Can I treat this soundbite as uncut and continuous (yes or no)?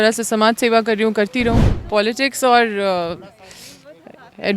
no